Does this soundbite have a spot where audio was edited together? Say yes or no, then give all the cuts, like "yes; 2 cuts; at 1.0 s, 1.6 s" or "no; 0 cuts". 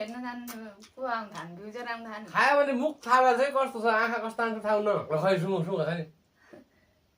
yes; 2 cuts; at 2.3 s, 5.0 s